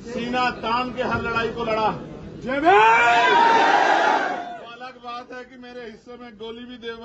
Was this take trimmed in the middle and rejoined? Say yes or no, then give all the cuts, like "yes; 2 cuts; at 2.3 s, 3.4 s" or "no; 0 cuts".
no; 0 cuts